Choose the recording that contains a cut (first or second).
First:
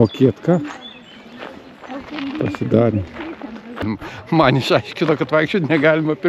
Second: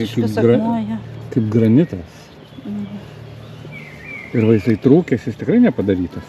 first